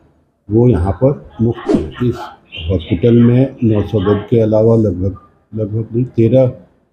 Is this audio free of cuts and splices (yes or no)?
no